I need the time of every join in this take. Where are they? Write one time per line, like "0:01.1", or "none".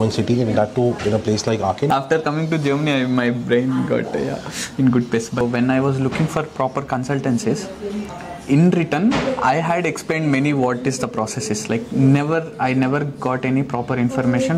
0:01.9
0:05.4